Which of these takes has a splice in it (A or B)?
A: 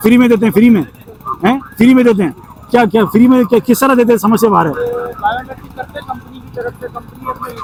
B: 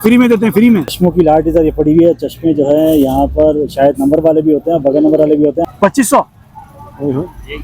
B